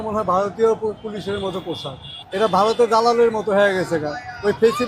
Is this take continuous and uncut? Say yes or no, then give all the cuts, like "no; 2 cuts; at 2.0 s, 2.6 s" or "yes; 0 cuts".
yes; 0 cuts